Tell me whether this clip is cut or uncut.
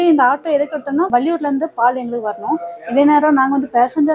cut